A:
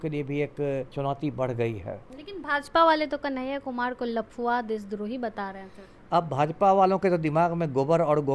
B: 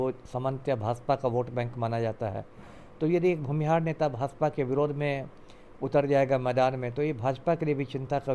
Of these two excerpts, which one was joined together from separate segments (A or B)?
A